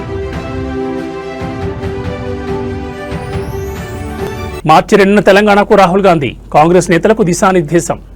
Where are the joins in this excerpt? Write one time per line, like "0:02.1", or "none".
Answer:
none